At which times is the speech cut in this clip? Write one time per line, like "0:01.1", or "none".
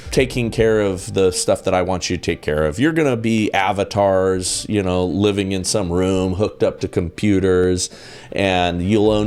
none